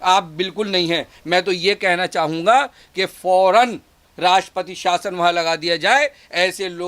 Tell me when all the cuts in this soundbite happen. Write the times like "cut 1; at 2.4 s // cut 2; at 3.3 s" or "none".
none